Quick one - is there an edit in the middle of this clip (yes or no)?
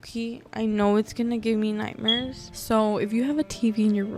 yes